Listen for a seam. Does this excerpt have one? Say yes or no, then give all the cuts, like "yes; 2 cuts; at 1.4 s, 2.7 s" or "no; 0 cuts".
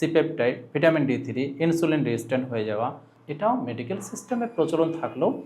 yes; 1 cut; at 3.1 s